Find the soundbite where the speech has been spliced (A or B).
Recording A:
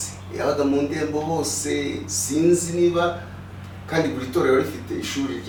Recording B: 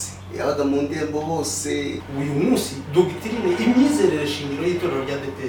B